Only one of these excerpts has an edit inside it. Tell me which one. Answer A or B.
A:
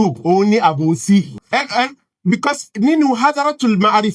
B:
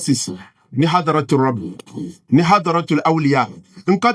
A